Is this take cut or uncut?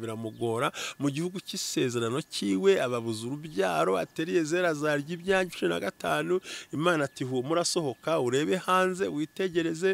uncut